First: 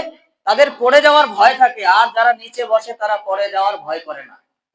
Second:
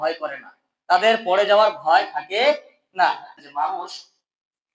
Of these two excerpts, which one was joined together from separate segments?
second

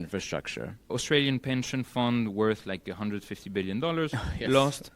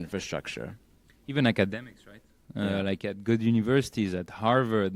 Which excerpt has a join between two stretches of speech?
first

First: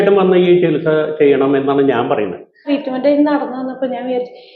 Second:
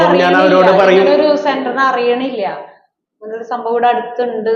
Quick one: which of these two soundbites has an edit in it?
first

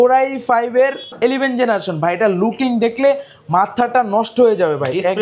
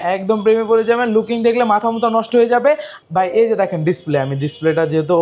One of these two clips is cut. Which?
second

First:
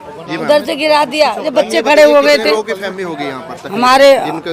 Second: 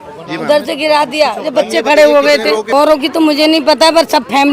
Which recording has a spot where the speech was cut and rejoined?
second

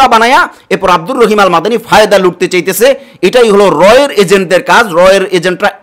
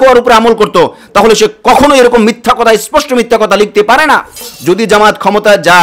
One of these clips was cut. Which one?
second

